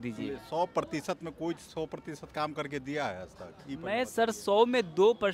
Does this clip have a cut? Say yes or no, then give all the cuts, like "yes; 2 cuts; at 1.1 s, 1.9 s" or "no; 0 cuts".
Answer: no; 0 cuts